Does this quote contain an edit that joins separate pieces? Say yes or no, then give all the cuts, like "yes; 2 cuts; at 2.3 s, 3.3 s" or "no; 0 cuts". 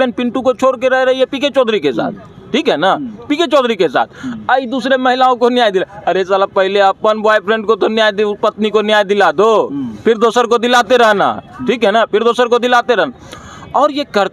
no; 0 cuts